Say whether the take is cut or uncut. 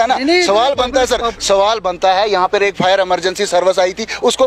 uncut